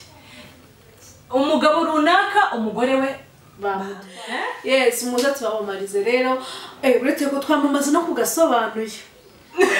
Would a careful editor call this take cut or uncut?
cut